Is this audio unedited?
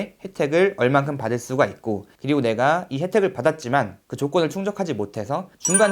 no; 1 cut; at 2.1 s

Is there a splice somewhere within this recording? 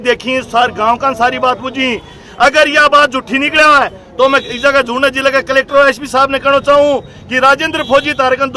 no; 0 cuts

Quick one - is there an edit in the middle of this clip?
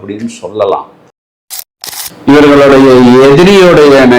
yes; 1 cut; at 1.6 s

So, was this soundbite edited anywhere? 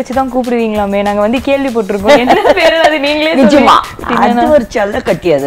yes; 1 cut; at 4.0 s

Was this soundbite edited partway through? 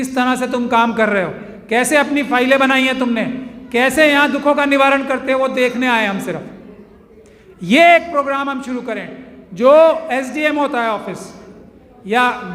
no; 0 cuts

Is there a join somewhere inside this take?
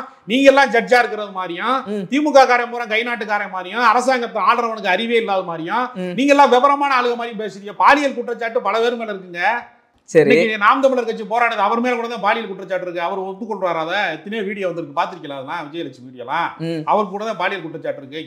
no; 0 cuts

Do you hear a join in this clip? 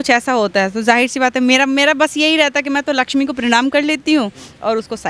no; 0 cuts

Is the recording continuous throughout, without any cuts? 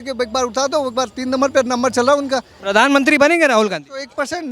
no; 1 cut; at 2.6 s

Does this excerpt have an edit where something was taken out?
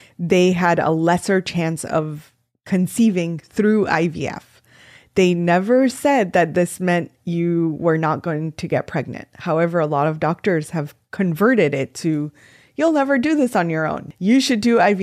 yes; 1 cut; at 14.0 s

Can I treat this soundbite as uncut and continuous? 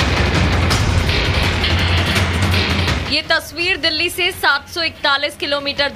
yes; 0 cuts

